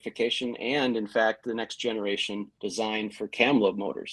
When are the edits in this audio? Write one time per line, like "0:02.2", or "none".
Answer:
0:02.5

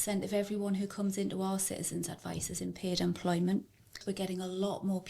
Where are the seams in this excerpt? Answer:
0:04.0

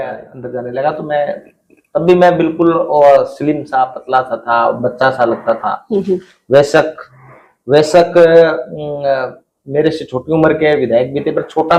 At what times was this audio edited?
none

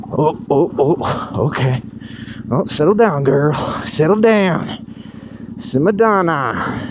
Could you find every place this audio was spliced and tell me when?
none

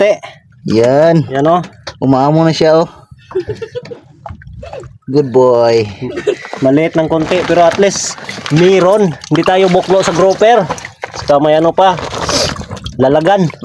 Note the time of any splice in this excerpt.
none

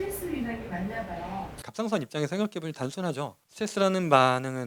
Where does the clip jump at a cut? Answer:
0:01.6
0:03.4

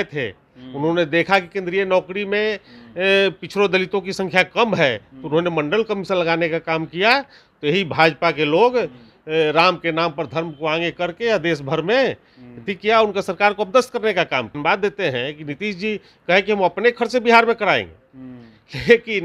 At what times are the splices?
0:14.5

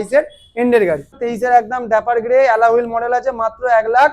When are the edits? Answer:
0:01.2

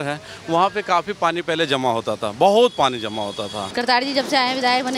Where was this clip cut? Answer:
0:03.6

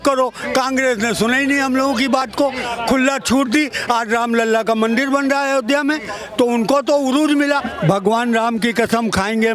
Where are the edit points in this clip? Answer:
none

